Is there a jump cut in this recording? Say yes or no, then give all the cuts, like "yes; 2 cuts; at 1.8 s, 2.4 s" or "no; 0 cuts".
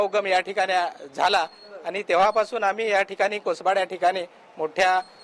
no; 0 cuts